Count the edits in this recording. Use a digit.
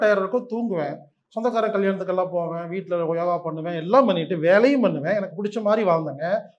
0